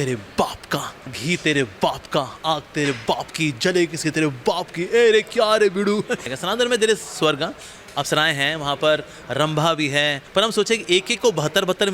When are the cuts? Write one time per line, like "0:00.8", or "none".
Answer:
0:01.2
0:06.3
0:10.2